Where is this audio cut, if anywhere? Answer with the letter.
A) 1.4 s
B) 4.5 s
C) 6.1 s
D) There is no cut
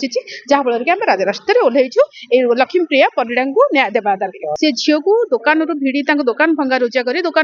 B